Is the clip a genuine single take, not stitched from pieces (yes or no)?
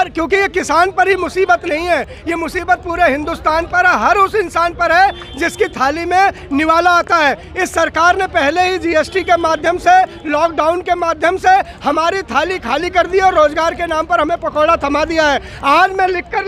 yes